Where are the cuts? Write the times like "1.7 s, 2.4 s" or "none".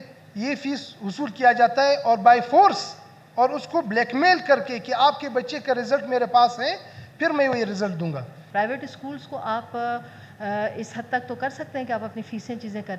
8.3 s